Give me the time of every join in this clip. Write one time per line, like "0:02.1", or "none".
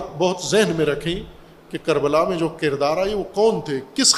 none